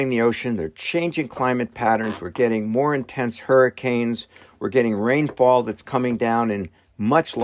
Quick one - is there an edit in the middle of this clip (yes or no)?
no